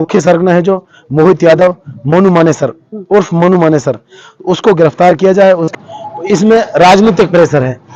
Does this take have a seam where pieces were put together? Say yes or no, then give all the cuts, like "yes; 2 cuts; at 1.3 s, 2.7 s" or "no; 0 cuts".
yes; 1 cut; at 5.7 s